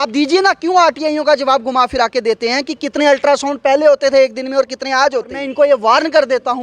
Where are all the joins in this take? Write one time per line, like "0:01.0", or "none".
0:05.4

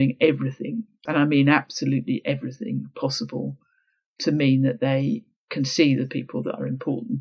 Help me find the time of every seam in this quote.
0:01.0

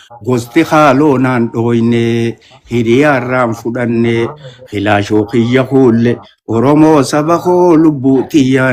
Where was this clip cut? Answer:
none

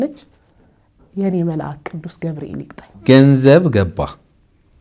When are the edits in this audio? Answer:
0:02.9

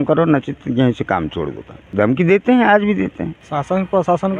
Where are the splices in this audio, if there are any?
0:01.8
0:03.3

